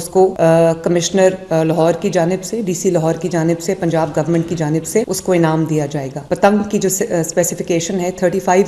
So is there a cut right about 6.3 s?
no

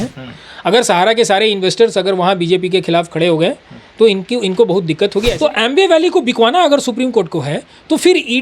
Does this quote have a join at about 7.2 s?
no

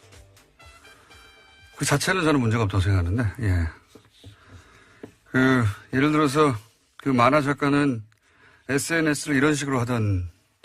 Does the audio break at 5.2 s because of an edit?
yes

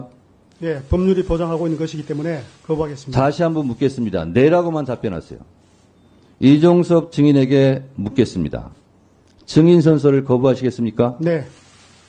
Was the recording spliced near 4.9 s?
no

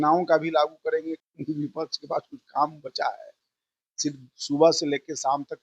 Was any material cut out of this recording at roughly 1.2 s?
yes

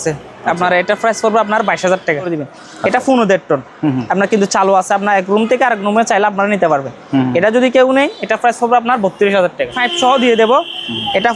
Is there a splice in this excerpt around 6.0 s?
no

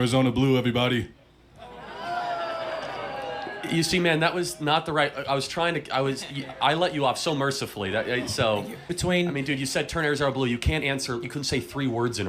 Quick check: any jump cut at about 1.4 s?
no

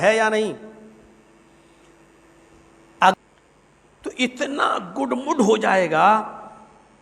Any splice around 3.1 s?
yes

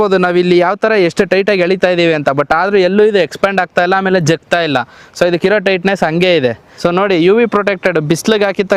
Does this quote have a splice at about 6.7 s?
yes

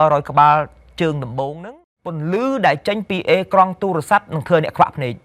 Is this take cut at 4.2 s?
no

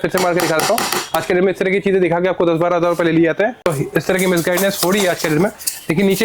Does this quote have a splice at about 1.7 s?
no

